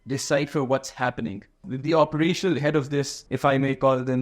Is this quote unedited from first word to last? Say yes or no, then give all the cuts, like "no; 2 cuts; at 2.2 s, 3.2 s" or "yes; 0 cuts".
no; 2 cuts; at 1.7 s, 3.2 s